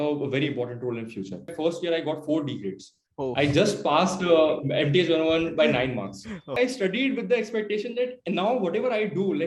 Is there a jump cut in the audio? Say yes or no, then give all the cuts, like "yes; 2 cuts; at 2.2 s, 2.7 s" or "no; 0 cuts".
yes; 2 cuts; at 1.5 s, 6.5 s